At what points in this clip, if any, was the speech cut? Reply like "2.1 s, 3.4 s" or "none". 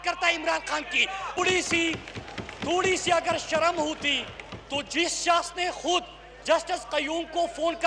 1.4 s